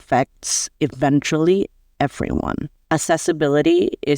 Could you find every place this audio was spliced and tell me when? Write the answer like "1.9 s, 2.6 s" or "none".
2.7 s